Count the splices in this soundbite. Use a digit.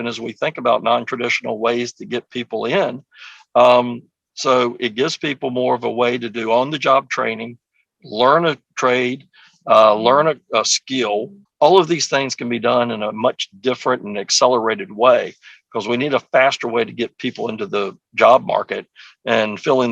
1